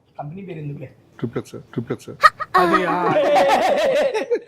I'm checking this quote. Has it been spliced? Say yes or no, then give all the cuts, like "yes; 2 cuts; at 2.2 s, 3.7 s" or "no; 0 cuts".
no; 0 cuts